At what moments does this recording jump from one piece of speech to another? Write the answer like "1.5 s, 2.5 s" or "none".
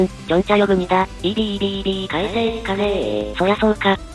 none